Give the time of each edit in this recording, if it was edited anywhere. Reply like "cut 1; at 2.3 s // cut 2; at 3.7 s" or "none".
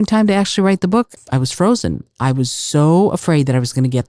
cut 1; at 1.2 s